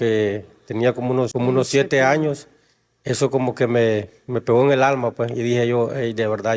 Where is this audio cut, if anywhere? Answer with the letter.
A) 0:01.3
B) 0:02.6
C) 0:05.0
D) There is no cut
A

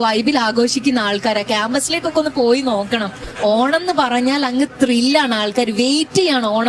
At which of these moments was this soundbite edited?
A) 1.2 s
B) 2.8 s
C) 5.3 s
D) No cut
D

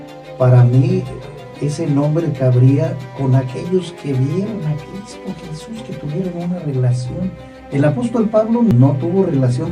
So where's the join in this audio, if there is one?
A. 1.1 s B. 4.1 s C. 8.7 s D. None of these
C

